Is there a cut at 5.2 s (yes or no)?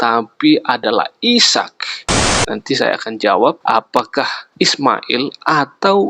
no